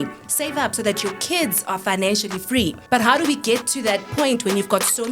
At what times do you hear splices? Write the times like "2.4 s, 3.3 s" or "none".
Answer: 2.8 s, 4.1 s